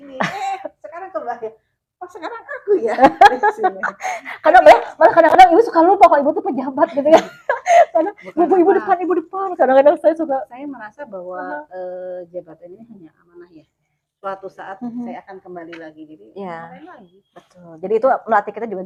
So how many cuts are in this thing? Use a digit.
0